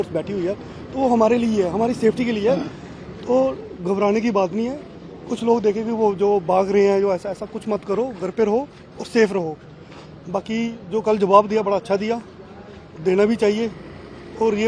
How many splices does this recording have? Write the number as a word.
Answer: zero